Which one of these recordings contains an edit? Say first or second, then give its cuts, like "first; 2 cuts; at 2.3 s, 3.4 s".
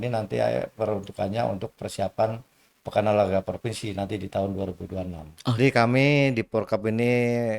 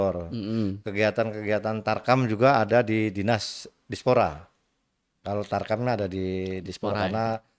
first; 1 cut; at 5.6 s